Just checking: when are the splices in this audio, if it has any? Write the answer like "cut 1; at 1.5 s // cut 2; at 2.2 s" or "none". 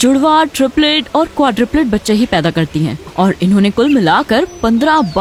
none